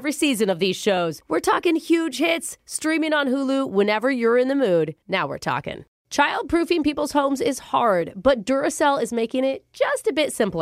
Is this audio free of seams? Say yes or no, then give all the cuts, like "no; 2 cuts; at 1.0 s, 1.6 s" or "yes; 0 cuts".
no; 1 cut; at 5.9 s